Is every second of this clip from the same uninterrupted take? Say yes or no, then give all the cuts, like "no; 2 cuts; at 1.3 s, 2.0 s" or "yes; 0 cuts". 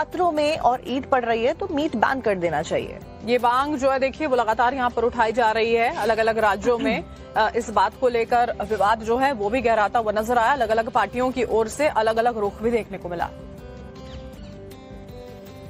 no; 1 cut; at 7.5 s